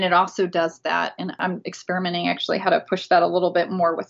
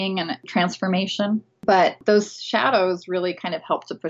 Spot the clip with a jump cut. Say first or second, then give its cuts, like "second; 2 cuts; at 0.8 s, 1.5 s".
first; 1 cut; at 1.4 s